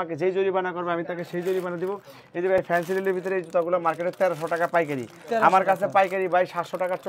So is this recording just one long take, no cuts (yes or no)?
yes